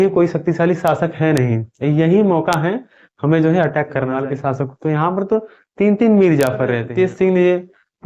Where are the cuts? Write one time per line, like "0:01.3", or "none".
0:04.1
0:06.8